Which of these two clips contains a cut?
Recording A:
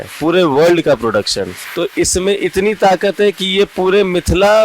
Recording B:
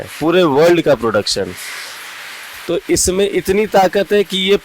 A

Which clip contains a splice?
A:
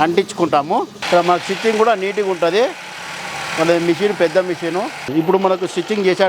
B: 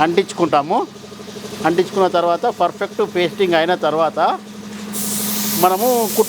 A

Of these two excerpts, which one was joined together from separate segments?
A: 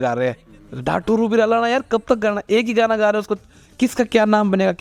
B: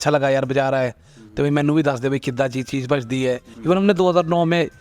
B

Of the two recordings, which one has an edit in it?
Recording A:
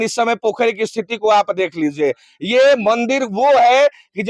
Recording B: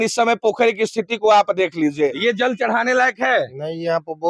B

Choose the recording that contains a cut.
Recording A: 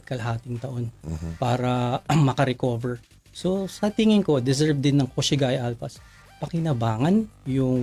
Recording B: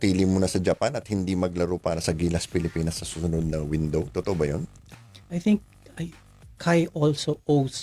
B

